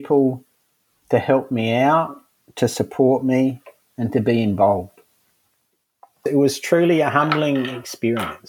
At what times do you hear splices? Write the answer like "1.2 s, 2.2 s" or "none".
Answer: 6.2 s